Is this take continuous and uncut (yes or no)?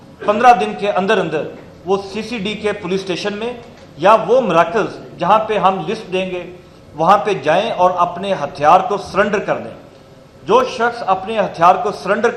yes